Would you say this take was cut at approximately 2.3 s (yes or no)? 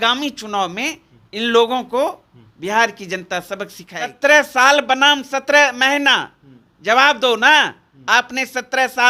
no